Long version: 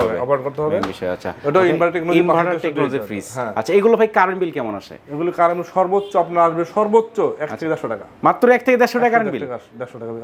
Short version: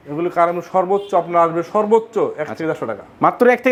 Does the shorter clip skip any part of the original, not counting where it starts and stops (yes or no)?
no